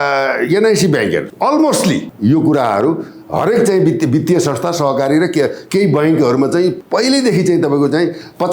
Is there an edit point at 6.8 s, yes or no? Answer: yes